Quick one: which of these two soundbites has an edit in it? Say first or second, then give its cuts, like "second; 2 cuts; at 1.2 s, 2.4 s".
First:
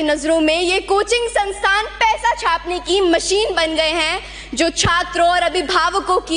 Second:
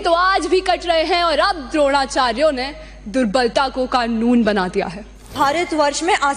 second; 1 cut; at 5.3 s